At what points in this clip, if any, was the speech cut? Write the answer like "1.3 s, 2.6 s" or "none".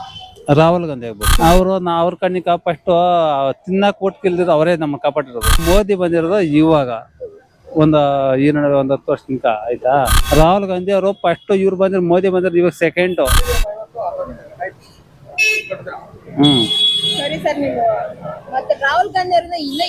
1.3 s, 5.6 s, 10.2 s